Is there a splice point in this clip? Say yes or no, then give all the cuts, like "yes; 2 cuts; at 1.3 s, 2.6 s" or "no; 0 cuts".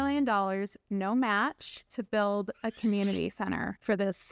no; 0 cuts